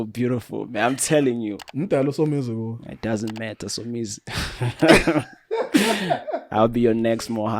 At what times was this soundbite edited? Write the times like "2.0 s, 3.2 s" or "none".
1.6 s